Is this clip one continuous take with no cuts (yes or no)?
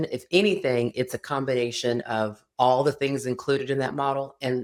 yes